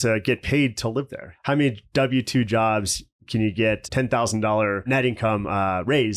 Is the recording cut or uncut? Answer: cut